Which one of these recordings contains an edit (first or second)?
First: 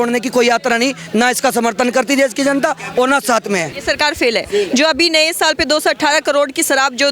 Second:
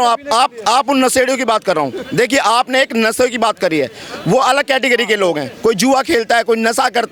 first